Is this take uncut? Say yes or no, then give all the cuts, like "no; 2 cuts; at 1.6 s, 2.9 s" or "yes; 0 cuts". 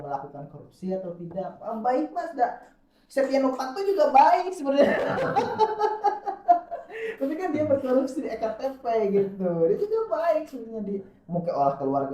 yes; 0 cuts